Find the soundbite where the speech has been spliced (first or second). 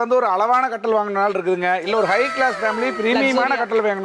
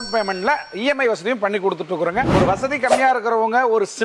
second